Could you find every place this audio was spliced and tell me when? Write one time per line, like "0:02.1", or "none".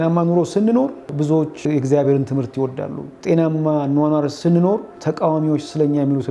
0:01.5
0:03.1
0:04.6